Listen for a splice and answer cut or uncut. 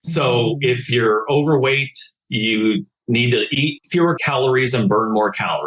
cut